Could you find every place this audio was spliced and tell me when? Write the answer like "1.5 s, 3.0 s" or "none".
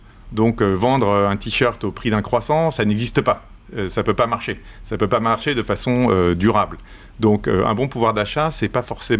none